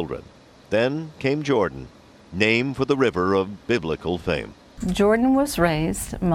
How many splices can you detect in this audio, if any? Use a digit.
1